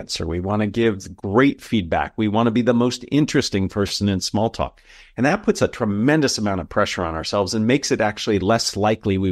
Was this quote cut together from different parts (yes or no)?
no